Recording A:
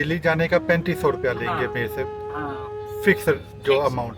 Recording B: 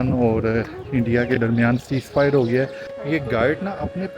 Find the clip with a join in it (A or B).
B